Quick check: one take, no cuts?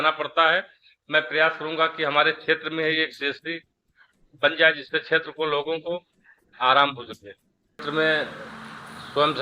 no; 1 cut; at 7.8 s

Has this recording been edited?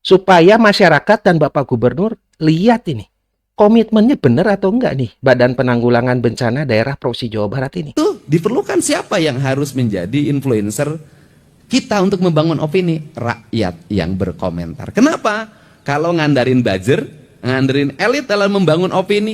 yes; 1 cut; at 7.9 s

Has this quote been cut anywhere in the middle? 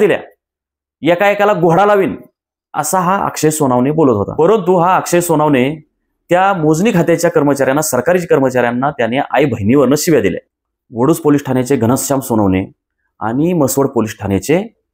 yes; 2 cuts; at 4.3 s, 10.5 s

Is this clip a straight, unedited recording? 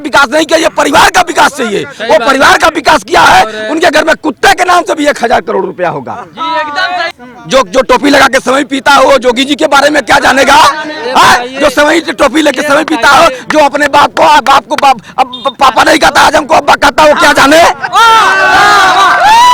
no; 1 cut; at 7.1 s

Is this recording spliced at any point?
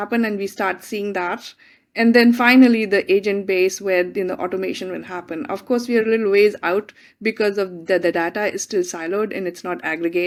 no; 0 cuts

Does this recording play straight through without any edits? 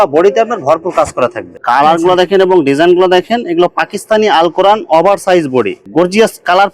no; 2 cuts; at 1.6 s, 5.8 s

